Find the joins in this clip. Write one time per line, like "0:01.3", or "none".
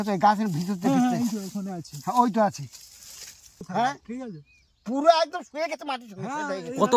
0:03.7